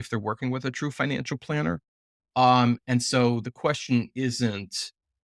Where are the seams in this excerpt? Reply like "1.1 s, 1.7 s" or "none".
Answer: none